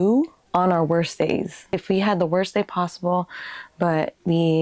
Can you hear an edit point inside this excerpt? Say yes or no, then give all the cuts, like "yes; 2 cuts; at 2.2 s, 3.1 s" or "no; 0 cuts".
yes; 1 cut; at 1.6 s